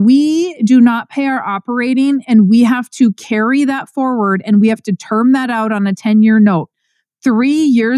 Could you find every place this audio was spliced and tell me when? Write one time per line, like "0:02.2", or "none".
none